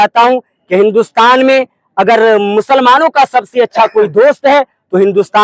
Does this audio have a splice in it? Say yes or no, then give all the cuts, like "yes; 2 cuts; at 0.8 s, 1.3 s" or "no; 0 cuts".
no; 0 cuts